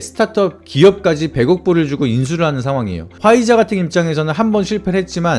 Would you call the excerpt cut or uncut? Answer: cut